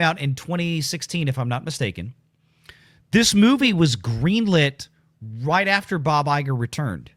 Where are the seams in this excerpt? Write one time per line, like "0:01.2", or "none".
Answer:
none